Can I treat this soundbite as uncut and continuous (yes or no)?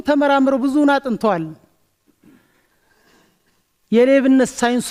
yes